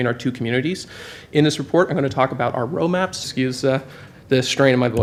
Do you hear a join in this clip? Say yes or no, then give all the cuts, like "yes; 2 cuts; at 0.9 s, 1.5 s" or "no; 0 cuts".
no; 0 cuts